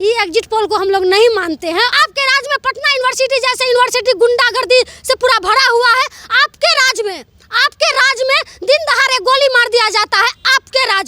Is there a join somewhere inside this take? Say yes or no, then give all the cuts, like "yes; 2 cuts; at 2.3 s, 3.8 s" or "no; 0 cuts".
yes; 1 cut; at 1.9 s